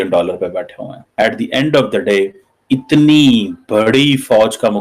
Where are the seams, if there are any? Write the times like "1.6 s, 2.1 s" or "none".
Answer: 1.0 s